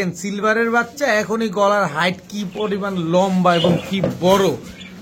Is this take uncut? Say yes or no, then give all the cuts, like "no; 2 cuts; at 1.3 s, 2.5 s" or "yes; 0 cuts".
yes; 0 cuts